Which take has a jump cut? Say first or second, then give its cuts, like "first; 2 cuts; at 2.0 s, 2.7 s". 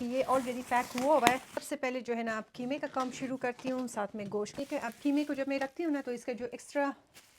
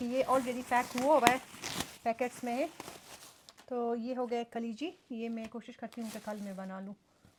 first; 2 cuts; at 1.5 s, 4.5 s